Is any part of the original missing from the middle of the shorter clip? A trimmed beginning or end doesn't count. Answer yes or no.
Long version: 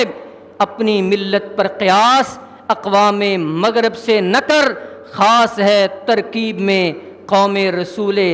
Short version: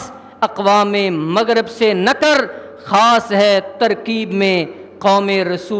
no